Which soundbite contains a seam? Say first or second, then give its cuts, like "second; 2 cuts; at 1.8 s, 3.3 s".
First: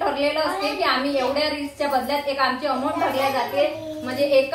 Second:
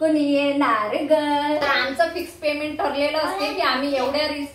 second; 1 cut; at 1.9 s